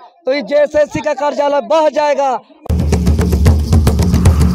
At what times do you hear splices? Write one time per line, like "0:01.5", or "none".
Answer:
0:02.5